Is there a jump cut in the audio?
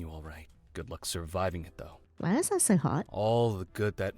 yes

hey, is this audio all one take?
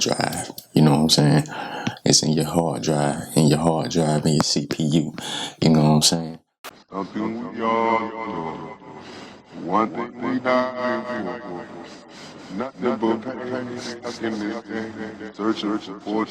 no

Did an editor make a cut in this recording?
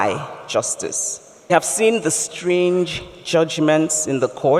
yes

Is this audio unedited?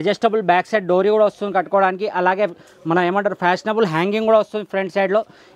yes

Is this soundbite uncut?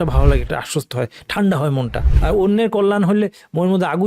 no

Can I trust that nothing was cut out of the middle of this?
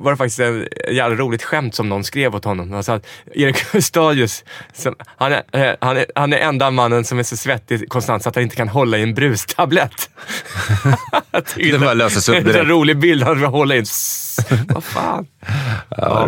yes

